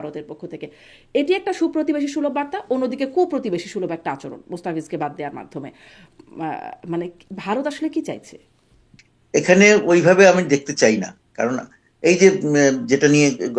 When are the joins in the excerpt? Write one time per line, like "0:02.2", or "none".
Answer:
none